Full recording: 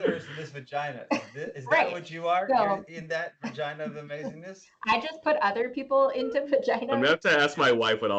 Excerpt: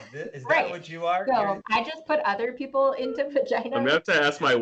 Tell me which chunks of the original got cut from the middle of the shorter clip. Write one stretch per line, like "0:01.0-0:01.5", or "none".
0:02.8-0:04.8